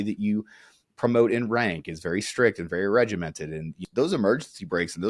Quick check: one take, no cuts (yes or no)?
no